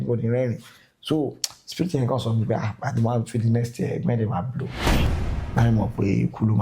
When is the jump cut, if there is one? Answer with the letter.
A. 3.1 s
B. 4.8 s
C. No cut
B